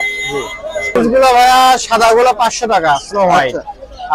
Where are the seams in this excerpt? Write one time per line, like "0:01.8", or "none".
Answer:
0:00.9

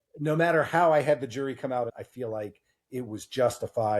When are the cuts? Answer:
0:02.0

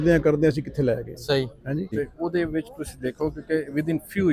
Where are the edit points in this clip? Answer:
0:01.9

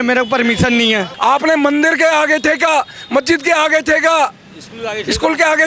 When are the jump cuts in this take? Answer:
0:01.1

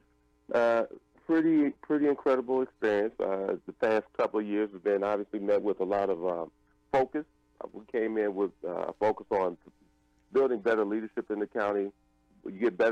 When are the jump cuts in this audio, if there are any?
0:05.4

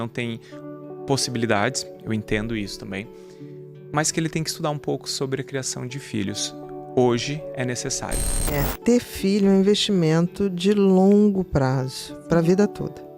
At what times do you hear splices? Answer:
0:08.6

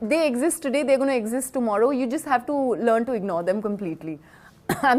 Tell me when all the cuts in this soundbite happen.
none

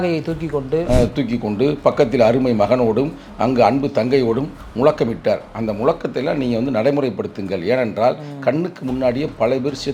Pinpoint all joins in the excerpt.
none

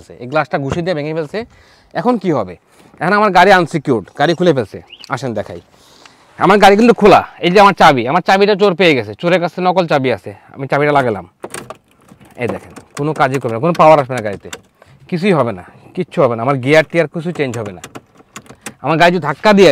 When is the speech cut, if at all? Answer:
none

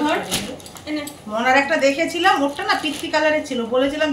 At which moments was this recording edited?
none

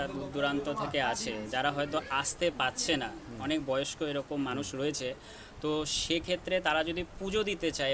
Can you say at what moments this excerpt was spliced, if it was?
none

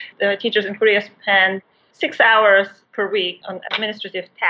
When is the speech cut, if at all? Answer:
0:03.4

